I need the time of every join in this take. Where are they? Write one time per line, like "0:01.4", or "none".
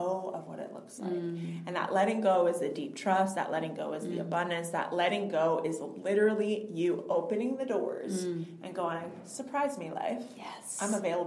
none